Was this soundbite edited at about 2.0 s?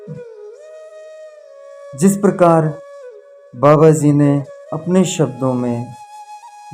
yes; 1 cut; at 2.0 s

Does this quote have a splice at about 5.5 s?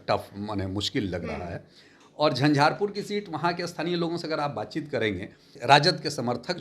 yes; 1 cut; at 5.5 s

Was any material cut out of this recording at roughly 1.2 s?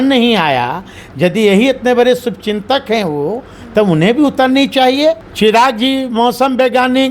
no; 1 cut; at 5.3 s

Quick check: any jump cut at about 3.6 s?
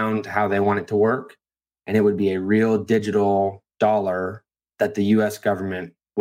yes; 1 cut; at 3.6 s

